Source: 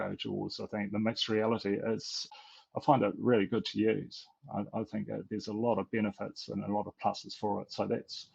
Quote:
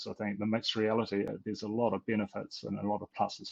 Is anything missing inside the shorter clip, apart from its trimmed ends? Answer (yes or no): yes